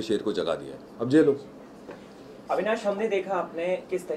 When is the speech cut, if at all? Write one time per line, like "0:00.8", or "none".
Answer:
none